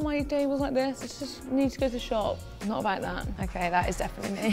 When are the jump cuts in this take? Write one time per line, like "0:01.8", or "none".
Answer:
0:02.5